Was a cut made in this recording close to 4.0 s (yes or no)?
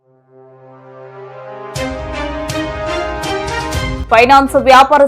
yes